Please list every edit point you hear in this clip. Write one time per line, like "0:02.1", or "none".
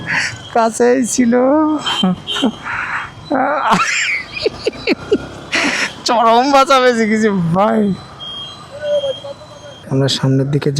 0:09.8